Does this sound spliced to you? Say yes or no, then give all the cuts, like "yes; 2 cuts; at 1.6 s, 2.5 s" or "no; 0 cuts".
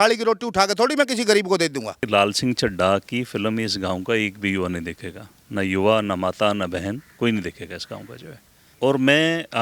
yes; 2 cuts; at 2.0 s, 8.7 s